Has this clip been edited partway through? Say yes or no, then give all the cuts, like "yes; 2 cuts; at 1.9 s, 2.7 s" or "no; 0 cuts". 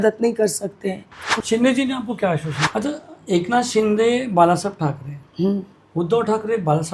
yes; 2 cuts; at 1.3 s, 2.6 s